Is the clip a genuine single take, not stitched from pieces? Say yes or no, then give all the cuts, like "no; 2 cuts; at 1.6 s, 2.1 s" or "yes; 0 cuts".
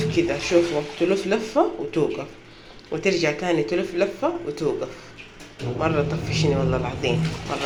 yes; 0 cuts